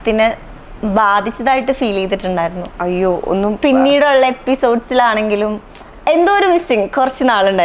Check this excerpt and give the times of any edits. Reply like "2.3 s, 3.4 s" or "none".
none